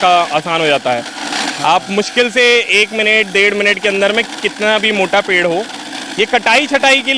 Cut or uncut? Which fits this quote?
uncut